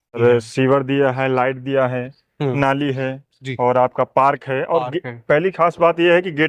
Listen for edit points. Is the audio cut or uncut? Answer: uncut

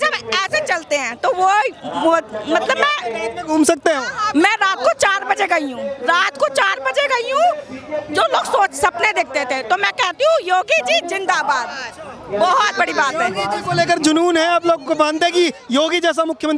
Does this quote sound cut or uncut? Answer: uncut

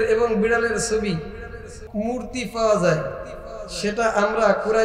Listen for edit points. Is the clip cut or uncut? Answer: cut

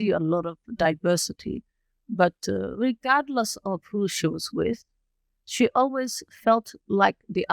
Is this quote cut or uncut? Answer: uncut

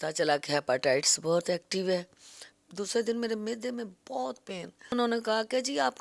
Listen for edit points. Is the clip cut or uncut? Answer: cut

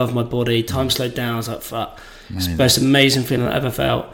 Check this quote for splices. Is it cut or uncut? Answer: uncut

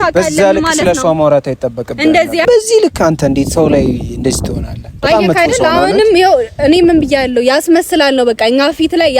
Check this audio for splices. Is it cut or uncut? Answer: cut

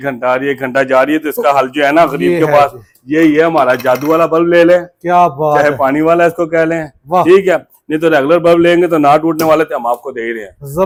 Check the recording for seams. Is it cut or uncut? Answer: uncut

